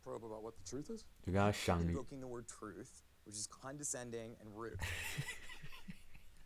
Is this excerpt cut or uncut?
uncut